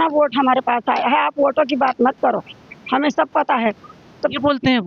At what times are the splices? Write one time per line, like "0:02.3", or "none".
none